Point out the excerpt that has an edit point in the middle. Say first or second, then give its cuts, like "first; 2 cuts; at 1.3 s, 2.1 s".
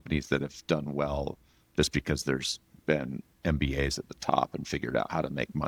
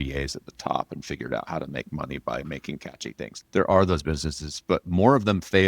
second; 1 cut; at 3.3 s